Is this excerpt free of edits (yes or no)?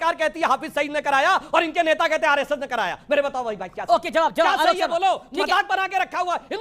yes